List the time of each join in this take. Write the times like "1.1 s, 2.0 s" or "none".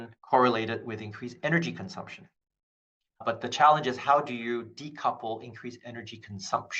none